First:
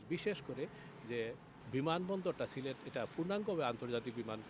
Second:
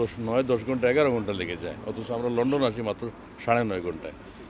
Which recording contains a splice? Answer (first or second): first